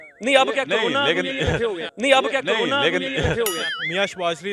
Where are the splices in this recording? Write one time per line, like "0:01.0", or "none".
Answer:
0:01.9
0:03.5